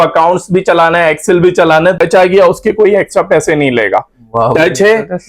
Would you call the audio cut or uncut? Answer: cut